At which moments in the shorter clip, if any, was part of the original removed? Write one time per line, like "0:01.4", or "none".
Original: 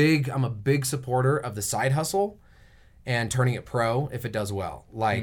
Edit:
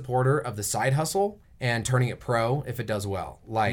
0:01.5